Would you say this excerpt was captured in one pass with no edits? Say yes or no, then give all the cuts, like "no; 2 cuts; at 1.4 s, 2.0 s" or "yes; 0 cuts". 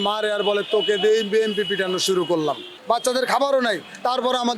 no; 1 cut; at 2.7 s